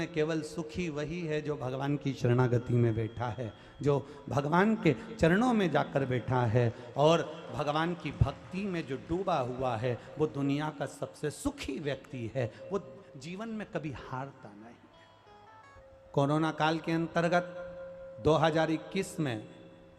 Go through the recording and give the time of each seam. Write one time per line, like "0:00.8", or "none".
0:15.8